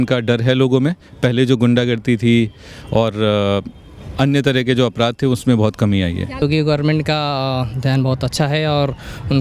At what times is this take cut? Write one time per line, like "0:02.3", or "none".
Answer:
0:06.4